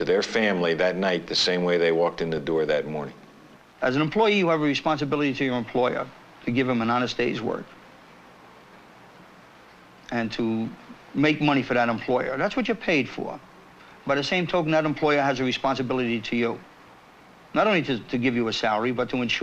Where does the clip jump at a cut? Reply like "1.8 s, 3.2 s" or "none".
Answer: 17.8 s